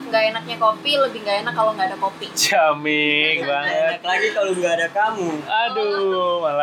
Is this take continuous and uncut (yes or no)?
yes